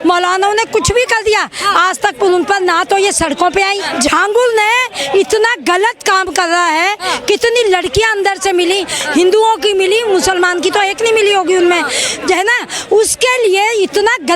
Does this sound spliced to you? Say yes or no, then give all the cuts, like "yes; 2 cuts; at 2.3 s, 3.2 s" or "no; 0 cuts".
yes; 1 cut; at 3.9 s